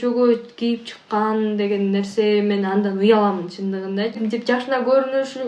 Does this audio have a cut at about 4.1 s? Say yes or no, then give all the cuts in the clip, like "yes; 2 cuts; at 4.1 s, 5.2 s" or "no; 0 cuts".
yes; 1 cut; at 4.1 s